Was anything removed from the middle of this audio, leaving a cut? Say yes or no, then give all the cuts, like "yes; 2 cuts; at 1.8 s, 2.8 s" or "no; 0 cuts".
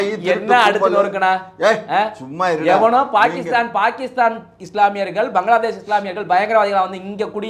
no; 0 cuts